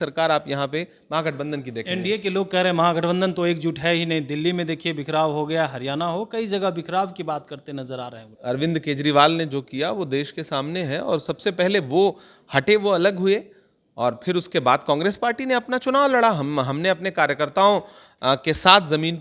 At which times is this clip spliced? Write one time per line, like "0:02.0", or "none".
0:08.3